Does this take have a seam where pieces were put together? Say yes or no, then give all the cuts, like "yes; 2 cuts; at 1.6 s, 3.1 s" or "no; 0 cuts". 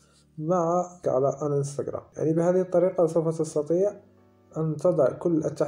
yes; 2 cuts; at 1.0 s, 2.0 s